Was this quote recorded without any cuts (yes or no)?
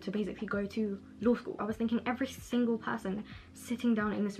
no